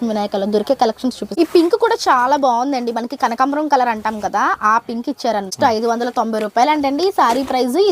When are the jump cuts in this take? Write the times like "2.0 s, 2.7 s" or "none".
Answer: 1.2 s, 5.5 s